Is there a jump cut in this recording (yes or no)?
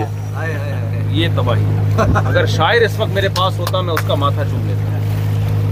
no